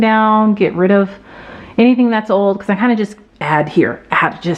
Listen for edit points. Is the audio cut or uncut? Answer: uncut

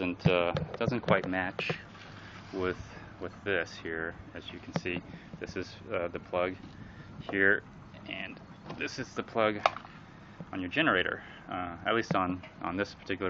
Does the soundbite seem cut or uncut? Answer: cut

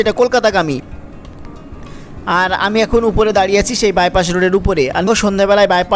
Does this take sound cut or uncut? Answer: cut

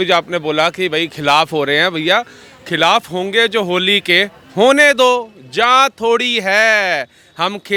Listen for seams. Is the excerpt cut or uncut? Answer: uncut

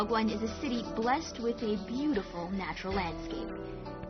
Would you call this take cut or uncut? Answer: cut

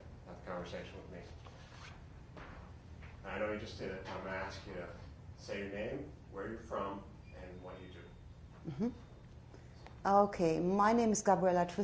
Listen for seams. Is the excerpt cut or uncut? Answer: uncut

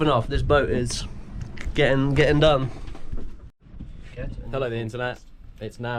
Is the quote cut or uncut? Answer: uncut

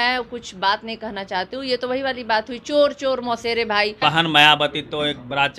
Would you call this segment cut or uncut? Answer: cut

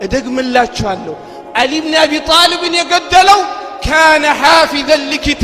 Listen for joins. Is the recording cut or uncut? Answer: uncut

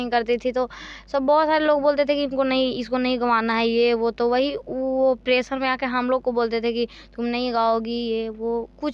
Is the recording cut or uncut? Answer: uncut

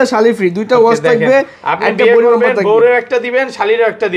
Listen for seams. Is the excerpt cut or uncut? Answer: uncut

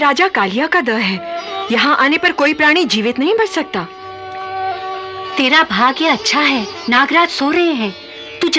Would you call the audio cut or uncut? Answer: uncut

